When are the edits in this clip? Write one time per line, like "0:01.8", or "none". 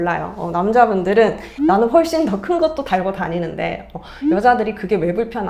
none